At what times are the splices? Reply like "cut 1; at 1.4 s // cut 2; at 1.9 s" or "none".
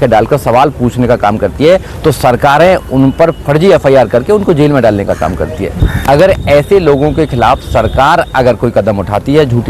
cut 1; at 5.8 s